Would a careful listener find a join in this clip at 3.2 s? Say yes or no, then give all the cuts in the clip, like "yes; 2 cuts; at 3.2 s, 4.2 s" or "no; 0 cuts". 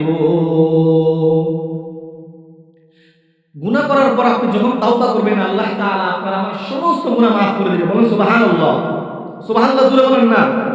no; 1 cut; at 8.0 s